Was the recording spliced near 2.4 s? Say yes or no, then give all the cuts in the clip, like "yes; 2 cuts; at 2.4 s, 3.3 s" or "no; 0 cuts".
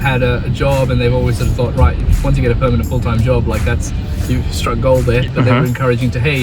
no; 1 cut; at 5.3 s